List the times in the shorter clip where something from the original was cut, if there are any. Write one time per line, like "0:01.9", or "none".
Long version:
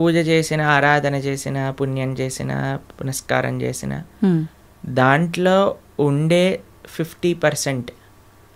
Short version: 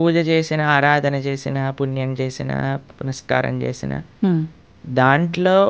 none